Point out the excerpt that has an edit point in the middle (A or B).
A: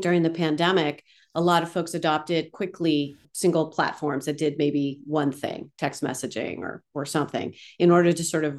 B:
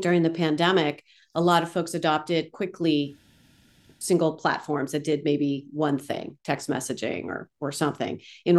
A